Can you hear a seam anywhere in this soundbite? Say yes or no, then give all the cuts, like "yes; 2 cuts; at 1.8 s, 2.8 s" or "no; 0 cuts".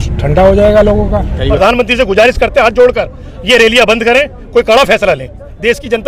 yes; 1 cut; at 1.5 s